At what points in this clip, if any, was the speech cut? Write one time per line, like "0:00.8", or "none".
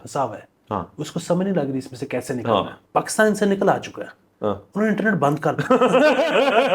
0:02.8